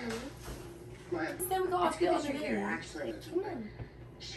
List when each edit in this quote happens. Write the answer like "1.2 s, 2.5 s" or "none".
1.4 s, 3.1 s